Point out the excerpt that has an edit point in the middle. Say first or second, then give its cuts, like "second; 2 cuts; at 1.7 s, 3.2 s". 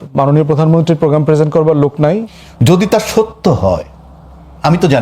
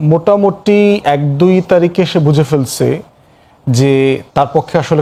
first; 1 cut; at 2.3 s